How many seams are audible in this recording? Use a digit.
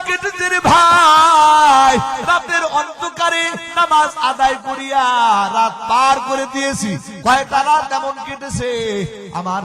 1